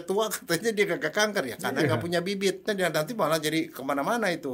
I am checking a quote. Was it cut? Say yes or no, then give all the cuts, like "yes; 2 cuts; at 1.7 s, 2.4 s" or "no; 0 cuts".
yes; 1 cut; at 2.6 s